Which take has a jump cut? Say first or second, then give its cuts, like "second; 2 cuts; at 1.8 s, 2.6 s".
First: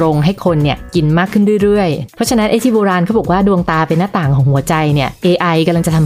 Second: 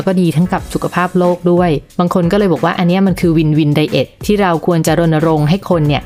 first; 1 cut; at 2.0 s